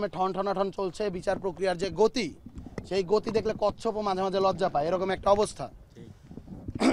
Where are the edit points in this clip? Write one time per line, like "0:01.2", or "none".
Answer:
none